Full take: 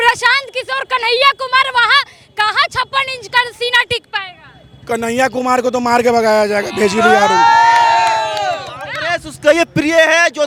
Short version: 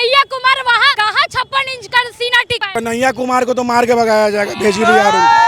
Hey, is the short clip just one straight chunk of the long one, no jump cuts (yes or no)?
no